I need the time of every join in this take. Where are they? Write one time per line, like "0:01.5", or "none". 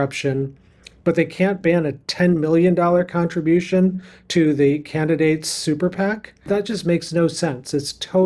0:06.5